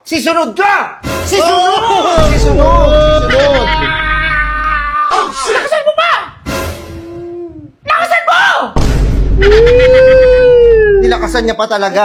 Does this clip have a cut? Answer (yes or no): no